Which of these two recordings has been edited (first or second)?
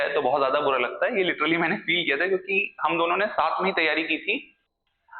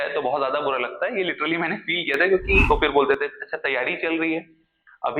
second